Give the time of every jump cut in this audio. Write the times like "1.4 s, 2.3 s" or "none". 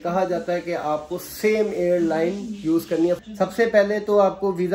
3.2 s